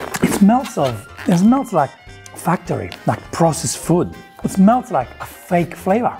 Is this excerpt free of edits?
yes; 0 cuts

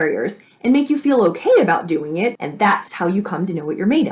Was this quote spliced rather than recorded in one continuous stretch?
yes; 1 cut; at 2.4 s

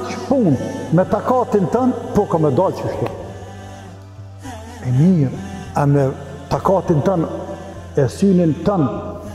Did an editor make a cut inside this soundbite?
yes; 2 cuts; at 3.3 s, 4.8 s

